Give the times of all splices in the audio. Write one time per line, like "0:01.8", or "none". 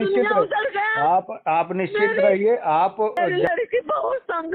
0:03.1

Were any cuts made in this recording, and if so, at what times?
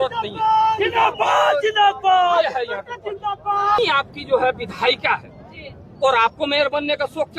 0:03.8

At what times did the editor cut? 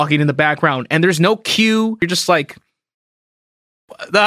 0:02.0

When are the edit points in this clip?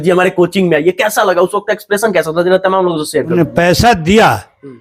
0:03.3

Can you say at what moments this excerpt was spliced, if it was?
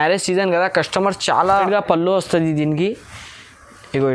0:01.6

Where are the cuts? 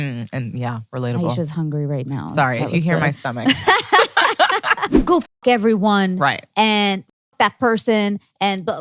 0:04.9

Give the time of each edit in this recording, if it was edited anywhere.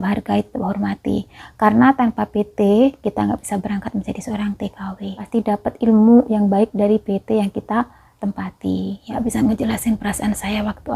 0:05.2
0:09.1

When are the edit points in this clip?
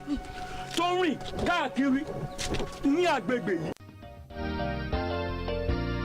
0:03.7

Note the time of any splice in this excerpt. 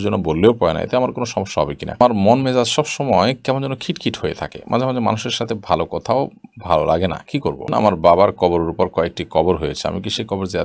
0:02.0
0:07.6

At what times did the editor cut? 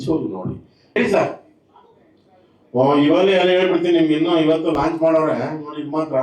0:01.0

